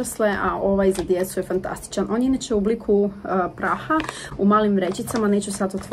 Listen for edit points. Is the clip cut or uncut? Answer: uncut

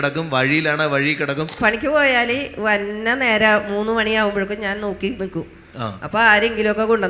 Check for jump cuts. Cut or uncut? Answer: cut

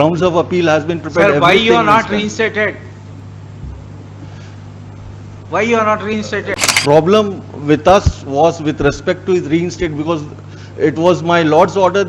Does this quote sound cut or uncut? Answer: cut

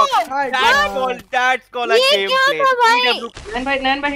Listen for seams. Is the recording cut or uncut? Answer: cut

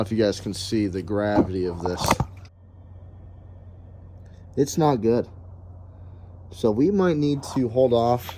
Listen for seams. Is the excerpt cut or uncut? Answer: uncut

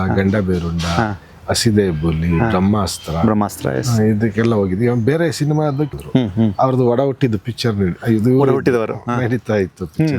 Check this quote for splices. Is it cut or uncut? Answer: cut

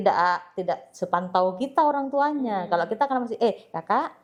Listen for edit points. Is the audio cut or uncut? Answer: uncut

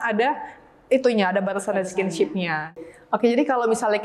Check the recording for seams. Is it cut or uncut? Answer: cut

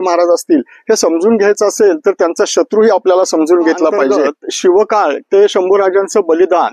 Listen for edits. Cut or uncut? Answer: cut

